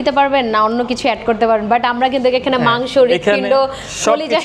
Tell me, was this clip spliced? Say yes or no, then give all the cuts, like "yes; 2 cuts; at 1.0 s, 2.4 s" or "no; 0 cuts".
no; 0 cuts